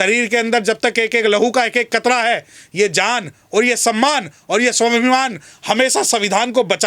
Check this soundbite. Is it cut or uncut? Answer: uncut